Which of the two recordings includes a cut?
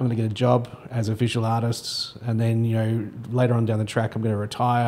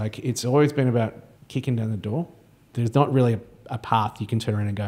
second; 2 cuts; at 1.3 s, 2.7 s

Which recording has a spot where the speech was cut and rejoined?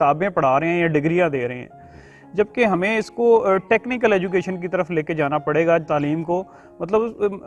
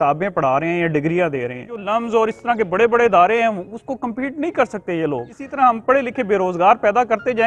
second; 2 cuts; at 1.8 s, 5.4 s

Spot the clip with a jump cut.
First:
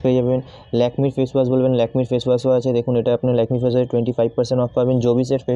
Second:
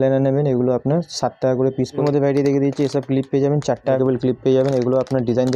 second; 2 cuts; at 2.0 s, 4.0 s

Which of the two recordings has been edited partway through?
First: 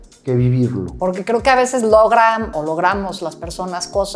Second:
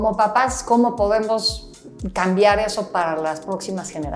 first; 2 cuts; at 0.9 s, 2.5 s

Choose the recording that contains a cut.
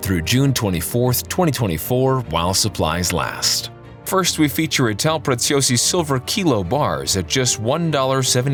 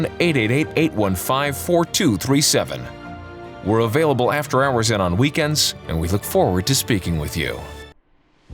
second; 1 cut; at 7.6 s

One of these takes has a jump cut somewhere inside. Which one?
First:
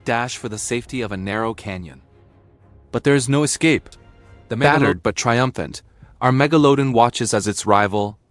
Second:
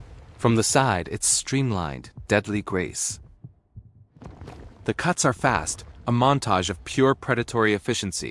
first; 1 cut; at 4.6 s

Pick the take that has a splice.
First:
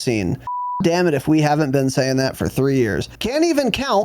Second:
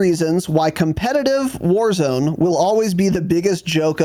first; 2 cuts; at 0.8 s, 3.1 s

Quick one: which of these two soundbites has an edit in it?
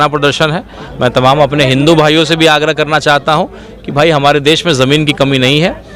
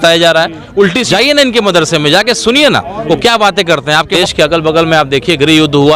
second; 2 cuts; at 1.1 s, 4.1 s

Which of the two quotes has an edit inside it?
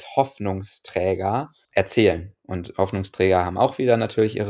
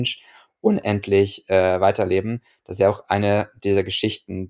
first; 1 cut; at 1.6 s

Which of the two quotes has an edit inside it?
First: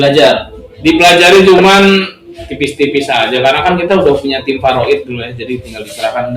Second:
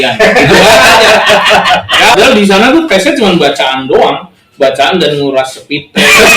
second; 1 cut; at 2.1 s

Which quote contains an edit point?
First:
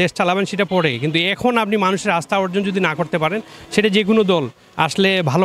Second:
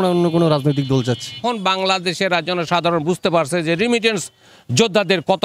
second; 1 cut; at 1.4 s

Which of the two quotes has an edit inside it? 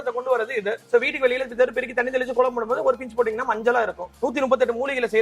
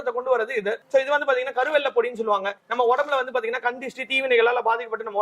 first; 2 cuts; at 0.8 s, 4.1 s

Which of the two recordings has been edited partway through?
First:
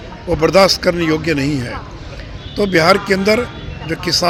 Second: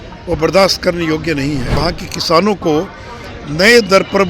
second; 1 cut; at 1.8 s

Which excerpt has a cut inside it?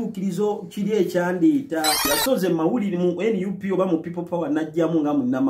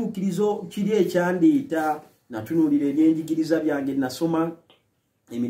first; 1 cut; at 2.1 s

